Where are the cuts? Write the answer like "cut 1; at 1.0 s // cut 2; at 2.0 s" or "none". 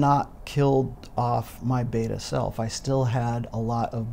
none